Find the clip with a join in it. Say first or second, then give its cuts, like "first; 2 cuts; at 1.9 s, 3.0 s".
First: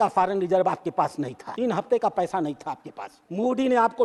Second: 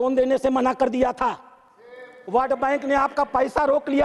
first; 2 cuts; at 1.4 s, 3.0 s